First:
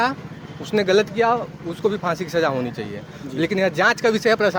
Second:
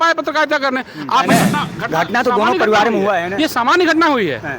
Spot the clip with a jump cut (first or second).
second